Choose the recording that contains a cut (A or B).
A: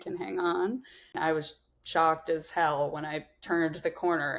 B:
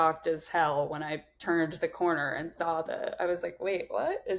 A